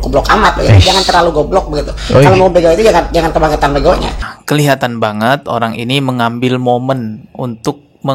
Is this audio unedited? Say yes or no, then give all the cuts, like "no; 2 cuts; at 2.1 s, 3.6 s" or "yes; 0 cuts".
no; 1 cut; at 4.2 s